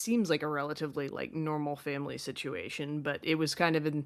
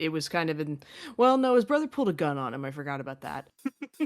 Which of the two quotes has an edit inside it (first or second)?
second